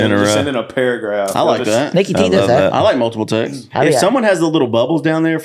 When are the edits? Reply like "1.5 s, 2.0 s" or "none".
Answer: 3.6 s